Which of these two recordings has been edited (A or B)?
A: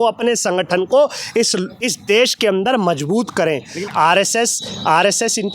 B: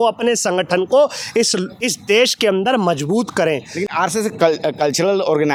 A